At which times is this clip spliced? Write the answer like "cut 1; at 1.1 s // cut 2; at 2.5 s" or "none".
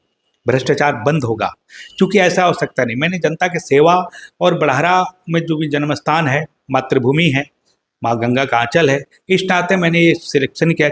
none